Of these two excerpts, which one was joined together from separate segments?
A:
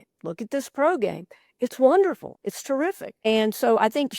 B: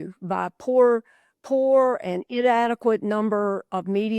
A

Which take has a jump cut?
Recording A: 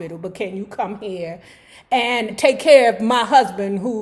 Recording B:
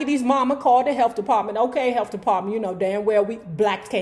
A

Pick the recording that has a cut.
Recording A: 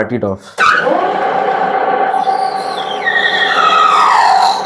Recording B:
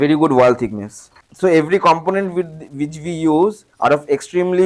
B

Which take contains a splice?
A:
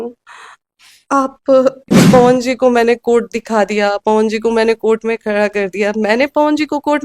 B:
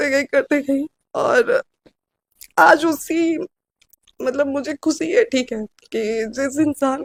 A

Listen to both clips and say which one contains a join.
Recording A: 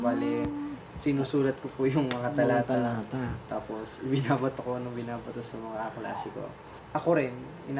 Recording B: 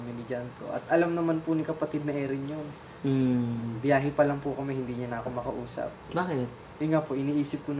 A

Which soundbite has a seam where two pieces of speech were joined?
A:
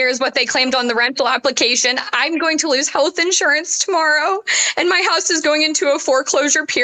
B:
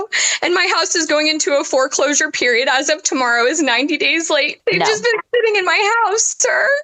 B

